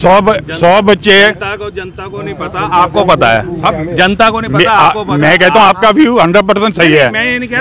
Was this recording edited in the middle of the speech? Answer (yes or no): no